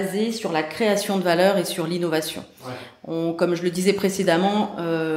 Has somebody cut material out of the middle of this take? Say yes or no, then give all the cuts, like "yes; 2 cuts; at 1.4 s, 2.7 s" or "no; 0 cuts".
no; 0 cuts